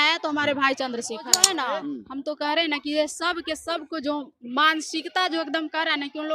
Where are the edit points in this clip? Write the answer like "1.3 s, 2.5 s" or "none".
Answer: 1.4 s